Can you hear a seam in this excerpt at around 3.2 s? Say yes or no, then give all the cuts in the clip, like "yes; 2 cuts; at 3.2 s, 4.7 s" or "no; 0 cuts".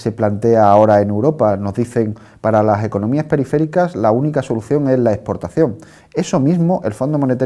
yes; 1 cut; at 3.2 s